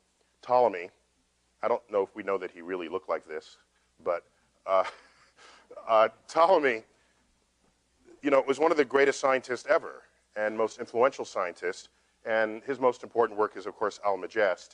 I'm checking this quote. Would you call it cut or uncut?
uncut